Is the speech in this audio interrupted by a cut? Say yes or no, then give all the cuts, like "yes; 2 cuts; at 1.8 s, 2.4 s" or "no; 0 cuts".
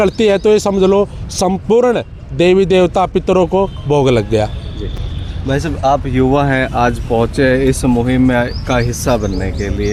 no; 0 cuts